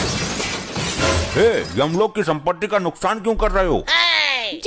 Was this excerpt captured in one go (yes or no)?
yes